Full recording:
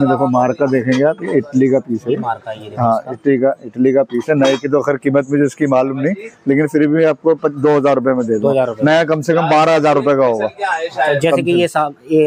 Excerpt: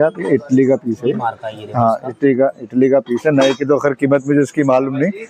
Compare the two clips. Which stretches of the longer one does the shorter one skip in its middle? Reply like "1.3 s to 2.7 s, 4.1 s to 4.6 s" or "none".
none